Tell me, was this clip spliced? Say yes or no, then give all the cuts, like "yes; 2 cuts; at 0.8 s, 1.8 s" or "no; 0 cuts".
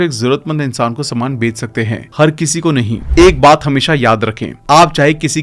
yes; 1 cut; at 3.0 s